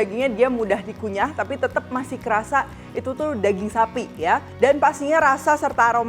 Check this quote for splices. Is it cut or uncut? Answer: uncut